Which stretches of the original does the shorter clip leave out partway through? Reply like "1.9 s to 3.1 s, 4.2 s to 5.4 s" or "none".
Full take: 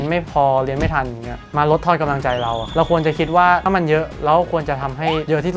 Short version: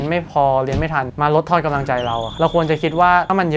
1.1 s to 1.5 s